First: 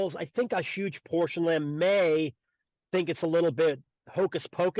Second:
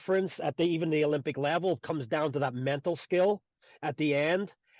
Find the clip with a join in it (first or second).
first